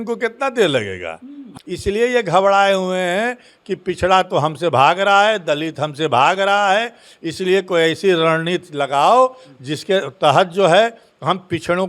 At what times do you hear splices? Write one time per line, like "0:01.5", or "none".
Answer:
0:01.4